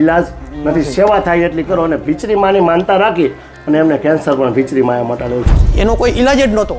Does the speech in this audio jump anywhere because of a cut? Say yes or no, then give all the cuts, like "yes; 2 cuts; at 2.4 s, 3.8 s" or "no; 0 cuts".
yes; 1 cut; at 5.5 s